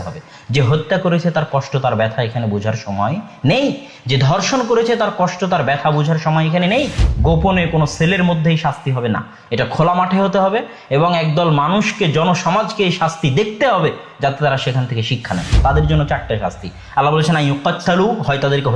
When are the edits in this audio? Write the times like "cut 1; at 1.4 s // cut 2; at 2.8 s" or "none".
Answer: cut 1; at 7.0 s // cut 2; at 15.6 s